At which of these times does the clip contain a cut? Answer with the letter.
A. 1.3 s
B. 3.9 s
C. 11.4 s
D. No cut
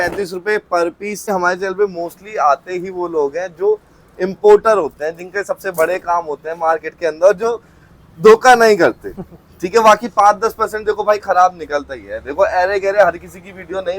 A